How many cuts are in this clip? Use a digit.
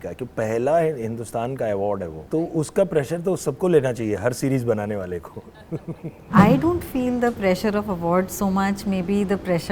2